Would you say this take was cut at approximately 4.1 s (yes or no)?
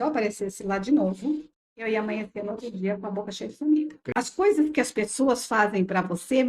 yes